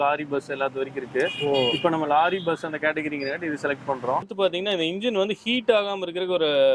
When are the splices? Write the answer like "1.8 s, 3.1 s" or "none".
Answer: 4.3 s